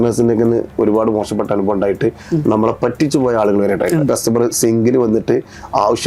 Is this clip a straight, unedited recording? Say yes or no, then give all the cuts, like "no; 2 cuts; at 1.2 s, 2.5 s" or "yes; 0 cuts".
no; 1 cut; at 4.1 s